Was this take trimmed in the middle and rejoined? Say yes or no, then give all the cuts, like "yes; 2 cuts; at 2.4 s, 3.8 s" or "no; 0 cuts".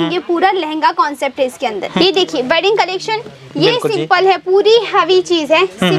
yes; 1 cut; at 1.9 s